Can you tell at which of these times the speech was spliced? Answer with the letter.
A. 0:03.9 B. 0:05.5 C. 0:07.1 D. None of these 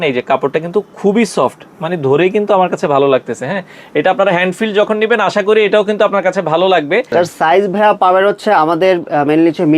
C